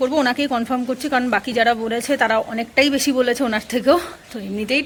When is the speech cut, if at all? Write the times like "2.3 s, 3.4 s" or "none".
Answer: none

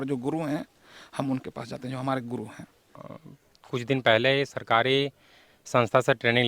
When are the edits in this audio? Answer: 3.1 s

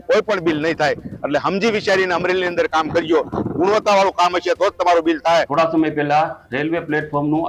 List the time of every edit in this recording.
5.5 s

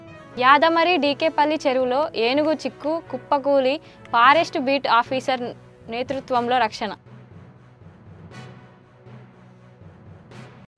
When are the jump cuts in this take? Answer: none

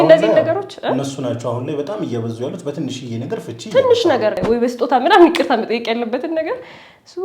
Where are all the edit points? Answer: 4.4 s

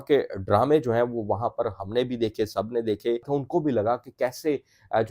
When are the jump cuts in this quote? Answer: 3.3 s

